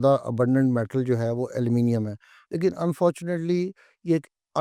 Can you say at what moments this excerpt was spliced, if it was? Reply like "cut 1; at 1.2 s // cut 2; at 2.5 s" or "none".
none

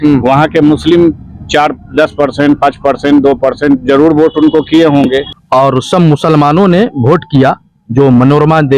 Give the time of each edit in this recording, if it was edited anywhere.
cut 1; at 5.3 s

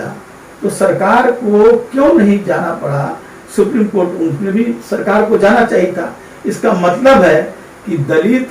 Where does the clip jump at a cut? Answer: none

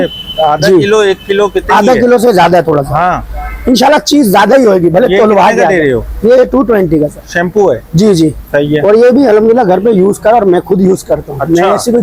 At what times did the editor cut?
none

